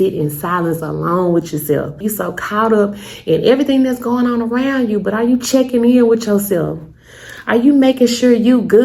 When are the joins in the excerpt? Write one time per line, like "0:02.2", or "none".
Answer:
0:02.0